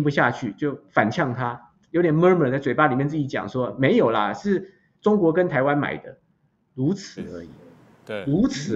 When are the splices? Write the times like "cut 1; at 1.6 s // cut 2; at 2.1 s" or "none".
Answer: none